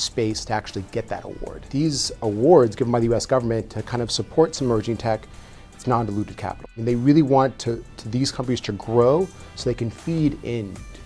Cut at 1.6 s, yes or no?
yes